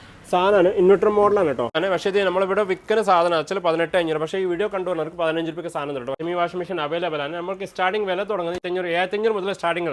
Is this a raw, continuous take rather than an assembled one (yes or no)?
no